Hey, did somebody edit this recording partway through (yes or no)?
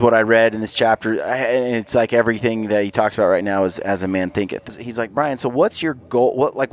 yes